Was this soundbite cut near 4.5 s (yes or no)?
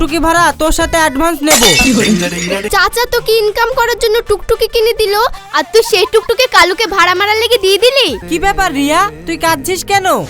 no